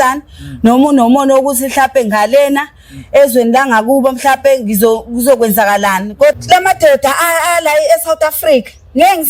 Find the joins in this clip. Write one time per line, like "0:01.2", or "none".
0:06.4